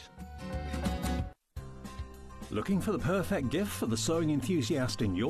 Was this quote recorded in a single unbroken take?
yes; 0 cuts

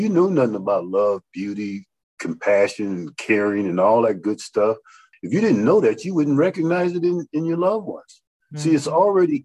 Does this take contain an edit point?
yes; 1 cut; at 5.1 s

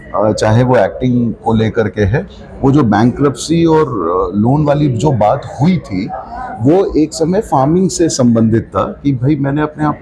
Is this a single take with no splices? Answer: yes; 0 cuts

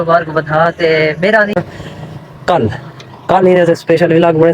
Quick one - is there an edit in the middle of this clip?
yes; 1 cut; at 1.6 s

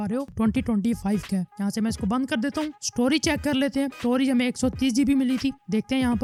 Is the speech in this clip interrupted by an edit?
no; 0 cuts

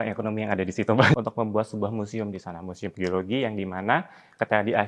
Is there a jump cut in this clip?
yes; 1 cut; at 1.1 s

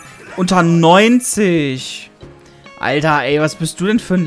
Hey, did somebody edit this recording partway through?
no; 0 cuts

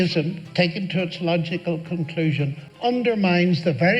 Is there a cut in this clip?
yes; 1 cut; at 2.6 s

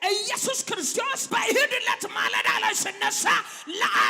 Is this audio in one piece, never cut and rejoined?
no; 1 cut; at 0.9 s

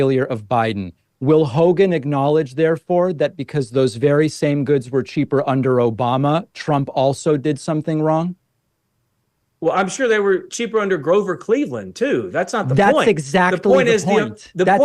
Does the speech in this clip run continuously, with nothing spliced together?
yes; 0 cuts

